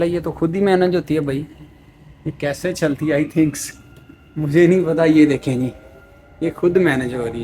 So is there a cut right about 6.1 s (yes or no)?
no